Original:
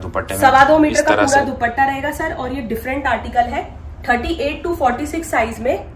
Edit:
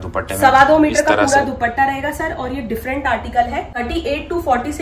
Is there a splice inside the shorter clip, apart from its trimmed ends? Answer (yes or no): yes